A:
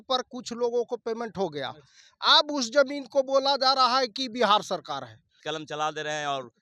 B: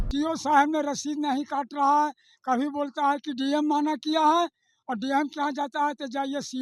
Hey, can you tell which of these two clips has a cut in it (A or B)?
A